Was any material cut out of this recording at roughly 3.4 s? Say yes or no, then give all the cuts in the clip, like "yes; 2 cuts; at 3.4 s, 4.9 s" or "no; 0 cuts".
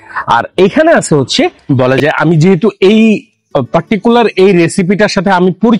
no; 1 cut; at 1.6 s